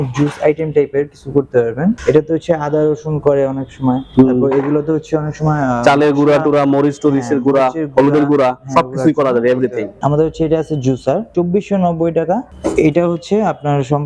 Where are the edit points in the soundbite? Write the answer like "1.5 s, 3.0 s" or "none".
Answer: 2.0 s, 4.0 s, 9.9 s, 11.3 s